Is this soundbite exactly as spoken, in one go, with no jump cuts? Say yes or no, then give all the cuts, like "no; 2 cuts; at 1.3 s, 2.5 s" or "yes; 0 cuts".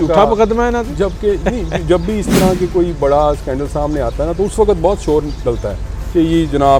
yes; 0 cuts